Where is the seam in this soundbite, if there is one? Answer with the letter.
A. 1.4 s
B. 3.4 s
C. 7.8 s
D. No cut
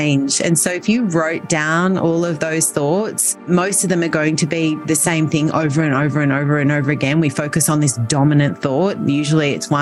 B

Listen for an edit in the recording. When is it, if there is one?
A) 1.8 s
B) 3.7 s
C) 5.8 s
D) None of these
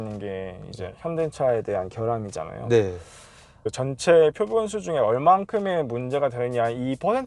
B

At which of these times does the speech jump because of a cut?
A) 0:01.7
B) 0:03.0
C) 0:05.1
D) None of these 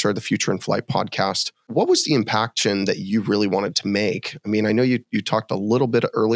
A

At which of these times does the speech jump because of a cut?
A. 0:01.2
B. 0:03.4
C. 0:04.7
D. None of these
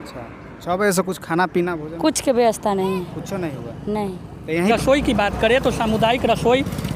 C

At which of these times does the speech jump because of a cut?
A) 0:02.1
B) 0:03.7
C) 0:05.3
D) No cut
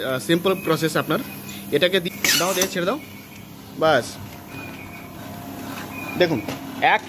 A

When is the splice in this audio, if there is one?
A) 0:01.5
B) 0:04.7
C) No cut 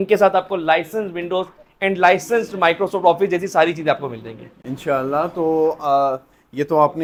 C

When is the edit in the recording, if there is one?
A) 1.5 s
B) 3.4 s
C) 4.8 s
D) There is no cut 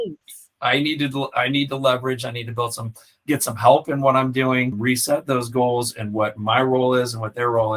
C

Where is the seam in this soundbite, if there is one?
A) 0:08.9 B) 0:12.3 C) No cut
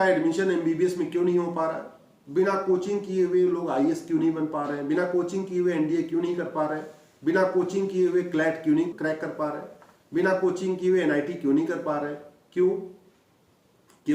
A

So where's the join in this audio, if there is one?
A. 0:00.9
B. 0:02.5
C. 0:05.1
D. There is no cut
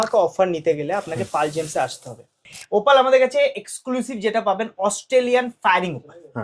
B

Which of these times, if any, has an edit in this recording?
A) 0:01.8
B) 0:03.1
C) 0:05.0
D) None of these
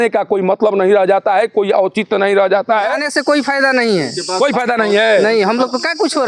B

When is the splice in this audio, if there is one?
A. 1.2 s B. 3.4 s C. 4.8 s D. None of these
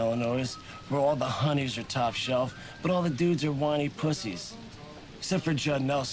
D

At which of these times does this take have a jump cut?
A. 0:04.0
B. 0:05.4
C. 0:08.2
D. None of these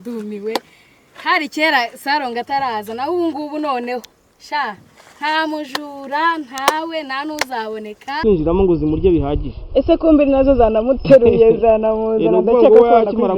C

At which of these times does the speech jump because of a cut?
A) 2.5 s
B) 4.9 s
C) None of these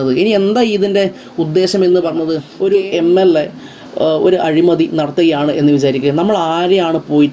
A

